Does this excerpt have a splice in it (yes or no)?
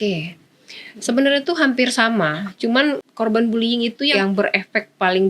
yes